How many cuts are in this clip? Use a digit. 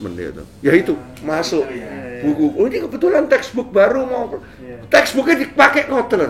0